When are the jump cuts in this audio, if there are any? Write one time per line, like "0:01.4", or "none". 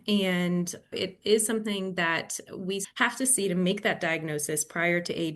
0:01.0
0:02.9